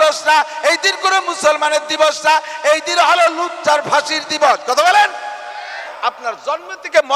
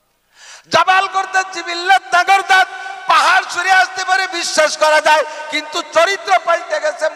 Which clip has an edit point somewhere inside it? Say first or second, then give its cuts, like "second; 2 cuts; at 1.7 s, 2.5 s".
first; 1 cut; at 5.9 s